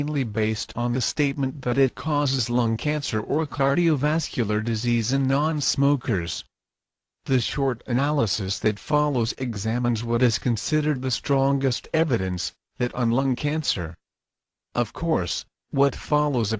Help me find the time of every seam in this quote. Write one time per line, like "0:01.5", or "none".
none